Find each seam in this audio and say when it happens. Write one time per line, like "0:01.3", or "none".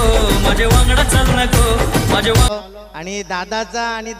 0:02.5

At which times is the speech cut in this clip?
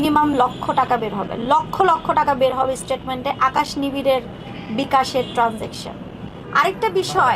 0:06.4

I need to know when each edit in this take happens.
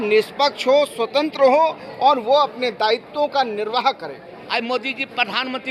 0:04.3

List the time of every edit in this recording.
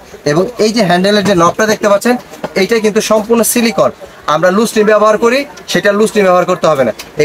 none

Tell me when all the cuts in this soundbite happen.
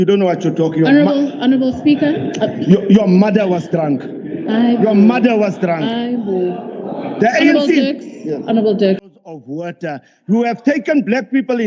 0:09.1

